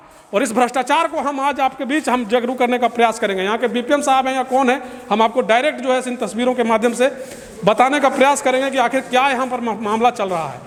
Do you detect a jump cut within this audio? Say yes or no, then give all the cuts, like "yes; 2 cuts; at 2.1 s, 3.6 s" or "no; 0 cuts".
no; 0 cuts